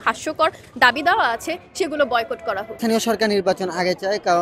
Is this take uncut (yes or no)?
no